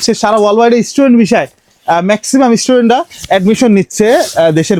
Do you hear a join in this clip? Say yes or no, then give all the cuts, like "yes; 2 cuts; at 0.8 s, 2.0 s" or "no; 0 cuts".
no; 0 cuts